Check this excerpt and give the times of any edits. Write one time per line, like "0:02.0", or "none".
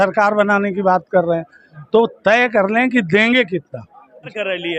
none